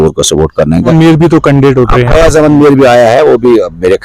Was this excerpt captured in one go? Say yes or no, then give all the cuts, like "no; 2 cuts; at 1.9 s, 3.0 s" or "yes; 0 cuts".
no; 1 cut; at 0.9 s